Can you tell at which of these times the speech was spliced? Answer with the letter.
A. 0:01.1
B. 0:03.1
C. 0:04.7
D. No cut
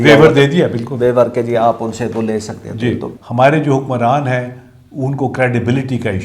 B